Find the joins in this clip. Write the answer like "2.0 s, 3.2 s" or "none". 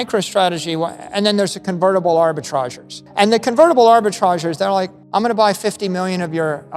3.0 s